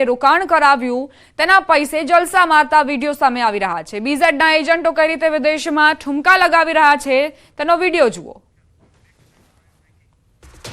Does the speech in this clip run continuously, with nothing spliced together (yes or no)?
no